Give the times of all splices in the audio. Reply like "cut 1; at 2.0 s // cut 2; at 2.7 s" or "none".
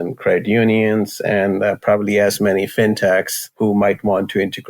cut 1; at 3.6 s